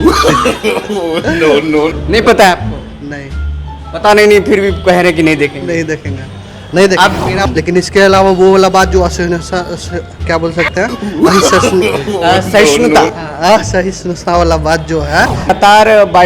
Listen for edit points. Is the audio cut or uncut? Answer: cut